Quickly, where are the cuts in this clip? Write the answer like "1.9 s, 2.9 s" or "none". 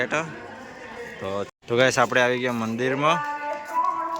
1.5 s